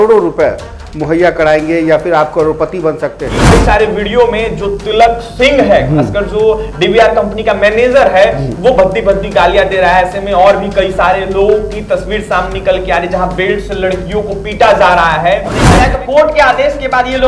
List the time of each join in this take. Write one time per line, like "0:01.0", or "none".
0:03.5
0:15.7